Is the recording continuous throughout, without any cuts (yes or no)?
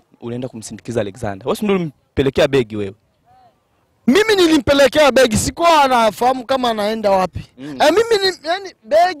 yes